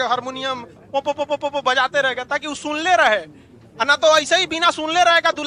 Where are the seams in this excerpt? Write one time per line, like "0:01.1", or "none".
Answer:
none